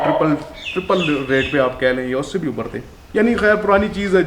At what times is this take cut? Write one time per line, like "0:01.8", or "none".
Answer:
none